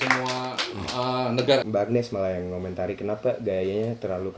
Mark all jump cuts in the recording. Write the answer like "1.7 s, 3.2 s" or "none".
1.7 s